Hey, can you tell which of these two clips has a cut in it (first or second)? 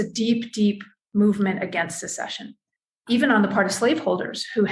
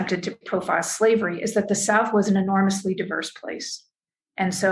first